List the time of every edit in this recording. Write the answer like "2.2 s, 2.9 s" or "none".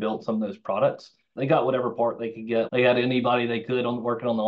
1.3 s, 2.7 s